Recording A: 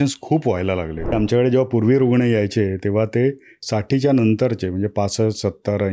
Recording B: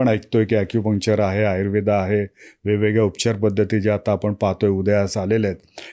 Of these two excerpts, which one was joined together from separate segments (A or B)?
A